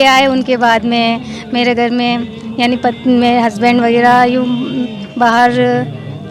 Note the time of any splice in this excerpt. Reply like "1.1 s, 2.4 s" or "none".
none